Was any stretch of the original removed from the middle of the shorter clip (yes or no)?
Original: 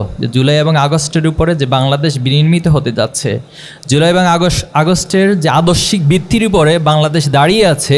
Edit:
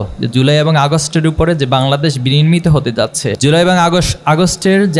yes